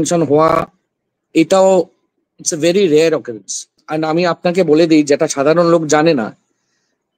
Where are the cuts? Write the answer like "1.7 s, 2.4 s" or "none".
3.8 s